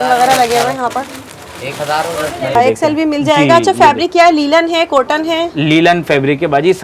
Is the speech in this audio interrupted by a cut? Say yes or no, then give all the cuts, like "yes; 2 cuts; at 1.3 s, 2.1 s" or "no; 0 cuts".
yes; 1 cut; at 2.5 s